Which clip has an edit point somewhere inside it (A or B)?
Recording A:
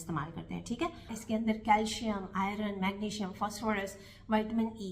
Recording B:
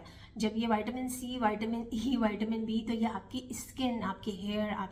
A